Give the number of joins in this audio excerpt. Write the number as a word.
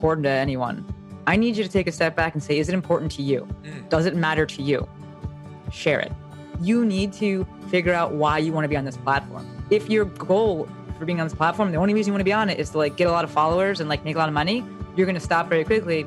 one